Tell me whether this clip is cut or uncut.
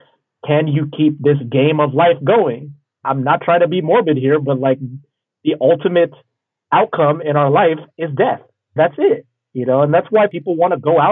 cut